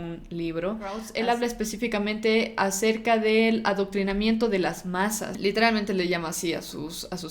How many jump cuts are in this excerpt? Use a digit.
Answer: 2